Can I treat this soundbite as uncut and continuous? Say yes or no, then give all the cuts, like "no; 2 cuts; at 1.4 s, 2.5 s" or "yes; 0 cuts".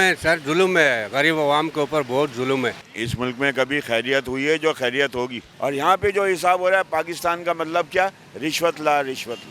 no; 2 cuts; at 2.8 s, 5.4 s